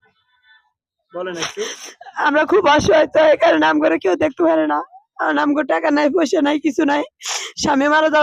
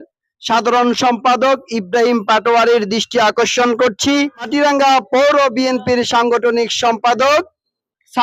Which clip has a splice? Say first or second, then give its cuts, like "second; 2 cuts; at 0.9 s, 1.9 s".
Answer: second; 1 cut; at 4.5 s